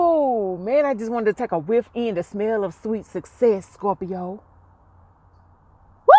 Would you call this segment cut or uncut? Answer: uncut